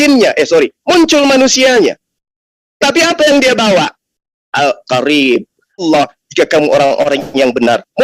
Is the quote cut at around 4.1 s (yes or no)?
no